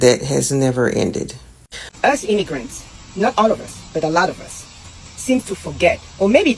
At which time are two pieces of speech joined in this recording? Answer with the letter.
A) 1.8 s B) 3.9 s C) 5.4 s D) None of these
A